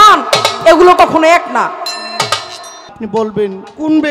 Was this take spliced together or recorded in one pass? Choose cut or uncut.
cut